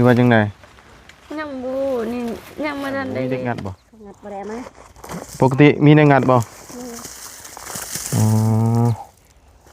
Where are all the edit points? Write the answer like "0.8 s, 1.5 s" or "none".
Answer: 3.5 s